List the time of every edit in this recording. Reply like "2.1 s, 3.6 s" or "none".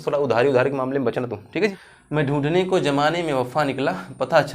1.9 s